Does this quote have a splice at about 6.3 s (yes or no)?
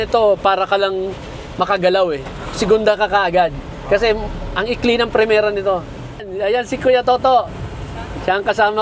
yes